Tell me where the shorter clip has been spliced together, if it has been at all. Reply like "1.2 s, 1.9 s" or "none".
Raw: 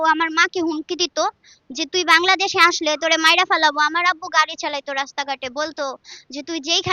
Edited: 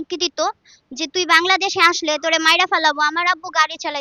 none